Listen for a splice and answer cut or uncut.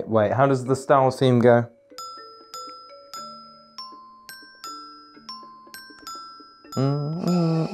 uncut